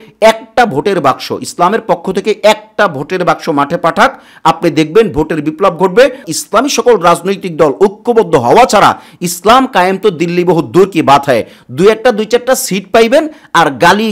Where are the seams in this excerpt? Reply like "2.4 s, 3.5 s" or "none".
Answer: 6.2 s